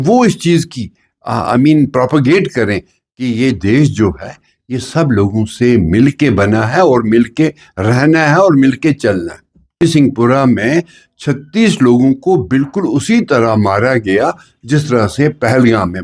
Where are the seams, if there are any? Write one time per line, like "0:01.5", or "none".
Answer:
0:09.8